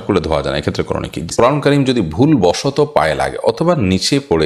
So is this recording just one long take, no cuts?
no; 1 cut; at 1.3 s

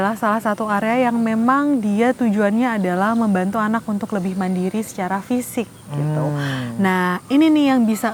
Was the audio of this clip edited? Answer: no; 0 cuts

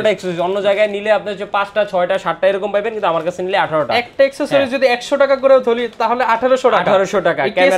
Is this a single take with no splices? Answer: yes; 0 cuts

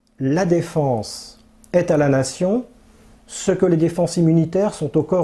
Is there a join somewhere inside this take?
no; 0 cuts

